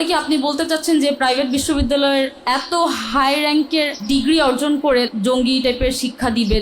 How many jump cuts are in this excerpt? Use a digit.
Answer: 3